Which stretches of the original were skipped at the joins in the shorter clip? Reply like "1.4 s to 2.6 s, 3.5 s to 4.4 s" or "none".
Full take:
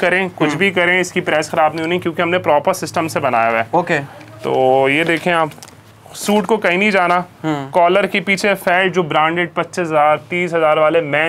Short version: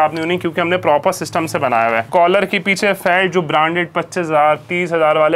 3.7 s to 7.7 s